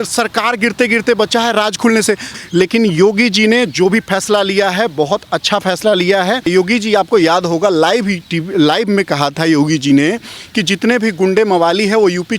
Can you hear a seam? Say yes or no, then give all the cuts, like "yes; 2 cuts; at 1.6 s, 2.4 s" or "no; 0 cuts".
yes; 2 cuts; at 2.3 s, 6.4 s